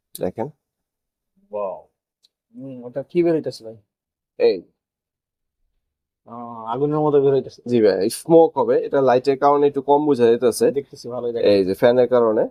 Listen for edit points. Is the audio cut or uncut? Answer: uncut